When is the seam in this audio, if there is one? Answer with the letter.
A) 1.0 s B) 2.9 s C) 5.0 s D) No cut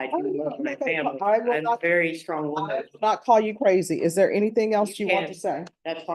D